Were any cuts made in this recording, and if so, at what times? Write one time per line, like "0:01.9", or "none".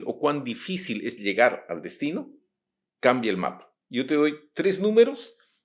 none